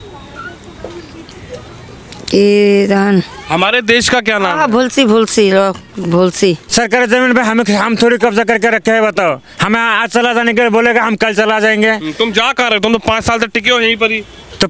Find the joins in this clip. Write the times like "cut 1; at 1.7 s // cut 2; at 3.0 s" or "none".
cut 1; at 6.6 s